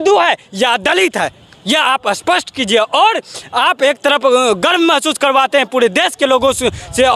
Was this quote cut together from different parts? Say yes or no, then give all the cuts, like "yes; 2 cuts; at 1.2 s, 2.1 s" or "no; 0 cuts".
no; 0 cuts